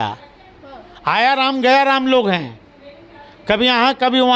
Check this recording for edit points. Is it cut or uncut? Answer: uncut